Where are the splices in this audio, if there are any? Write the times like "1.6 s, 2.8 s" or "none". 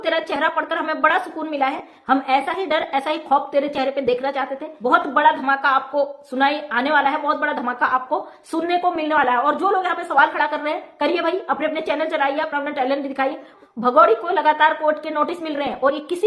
4.6 s, 13.5 s